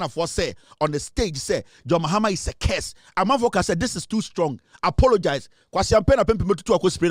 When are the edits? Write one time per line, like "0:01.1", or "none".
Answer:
none